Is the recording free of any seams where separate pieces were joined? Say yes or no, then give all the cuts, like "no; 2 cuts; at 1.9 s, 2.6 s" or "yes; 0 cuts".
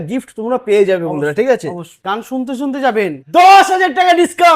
no; 2 cuts; at 2.0 s, 3.2 s